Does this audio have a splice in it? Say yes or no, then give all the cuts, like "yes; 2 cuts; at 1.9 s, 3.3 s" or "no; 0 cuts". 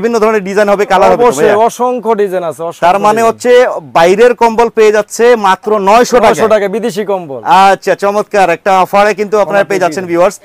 no; 0 cuts